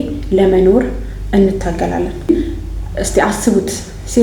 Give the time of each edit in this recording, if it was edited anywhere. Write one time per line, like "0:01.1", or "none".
0:02.3

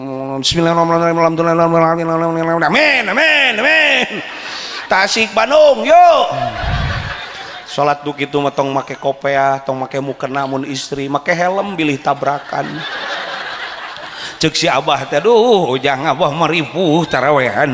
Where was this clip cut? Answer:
none

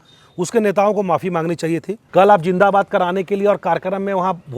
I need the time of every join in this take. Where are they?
0:02.0

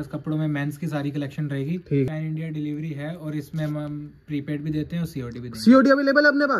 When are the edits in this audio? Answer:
0:02.1

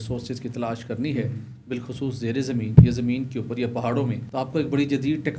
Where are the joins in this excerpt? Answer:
0:04.2

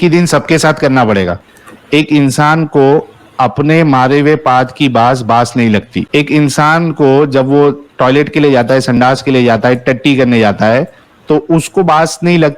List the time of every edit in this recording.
0:01.4

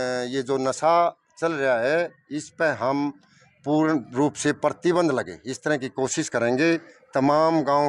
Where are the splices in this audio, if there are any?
none

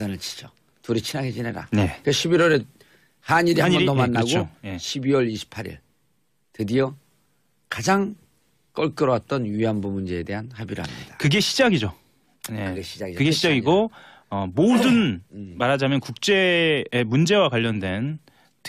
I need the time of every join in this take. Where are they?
0:07.8

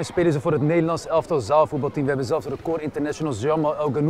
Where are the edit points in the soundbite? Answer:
none

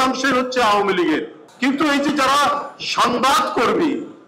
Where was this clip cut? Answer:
0:01.4

